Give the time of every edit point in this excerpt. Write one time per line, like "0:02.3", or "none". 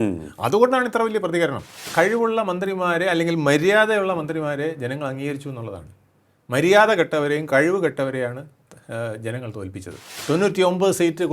0:01.8
0:10.1